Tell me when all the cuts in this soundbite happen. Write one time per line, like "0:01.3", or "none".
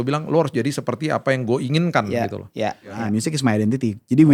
0:03.0